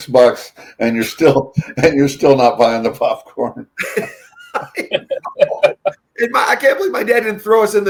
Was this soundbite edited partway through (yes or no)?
no